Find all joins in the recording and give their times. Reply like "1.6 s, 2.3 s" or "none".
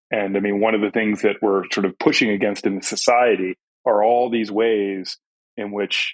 3.7 s